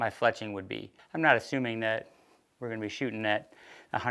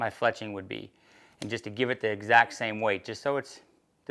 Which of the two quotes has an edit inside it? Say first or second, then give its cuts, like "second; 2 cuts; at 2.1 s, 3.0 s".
first; 1 cut; at 1.0 s